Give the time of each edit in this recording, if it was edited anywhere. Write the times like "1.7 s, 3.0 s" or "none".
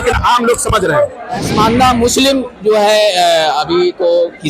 1.5 s